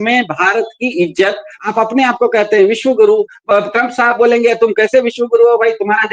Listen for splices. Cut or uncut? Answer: cut